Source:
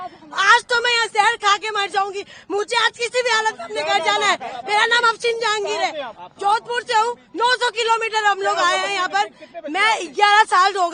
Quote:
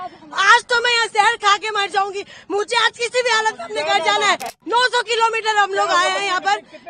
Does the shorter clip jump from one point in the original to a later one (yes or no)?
yes